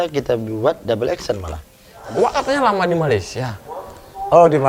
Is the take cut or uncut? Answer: cut